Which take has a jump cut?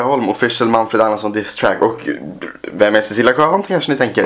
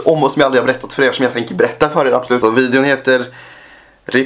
second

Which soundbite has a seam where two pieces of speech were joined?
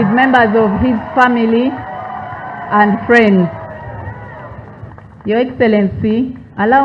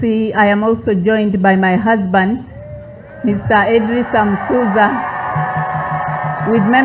first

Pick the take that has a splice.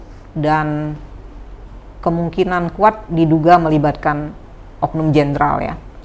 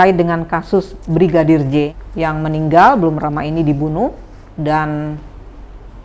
second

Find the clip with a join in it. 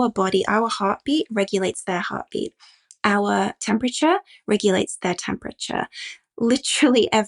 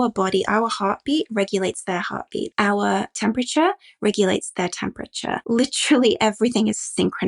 second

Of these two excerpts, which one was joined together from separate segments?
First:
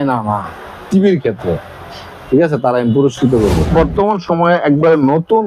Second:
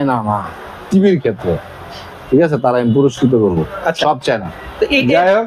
first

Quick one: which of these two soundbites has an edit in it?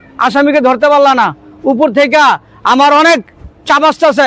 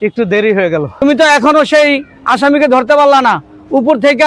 second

